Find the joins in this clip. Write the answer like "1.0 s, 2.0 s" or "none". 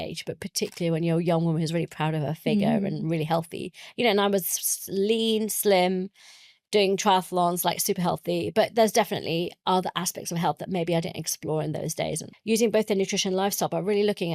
12.3 s